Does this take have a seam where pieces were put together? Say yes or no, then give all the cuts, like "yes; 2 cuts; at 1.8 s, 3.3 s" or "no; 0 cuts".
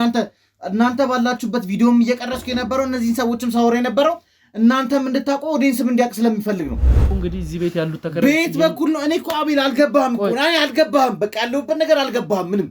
yes; 1 cut; at 7.1 s